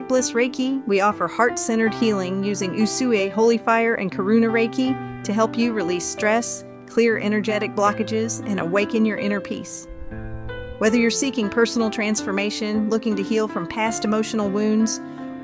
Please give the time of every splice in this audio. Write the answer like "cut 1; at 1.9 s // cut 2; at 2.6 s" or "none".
none